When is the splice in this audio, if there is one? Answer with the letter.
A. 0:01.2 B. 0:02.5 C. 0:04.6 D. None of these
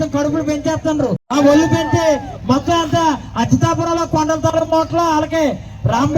A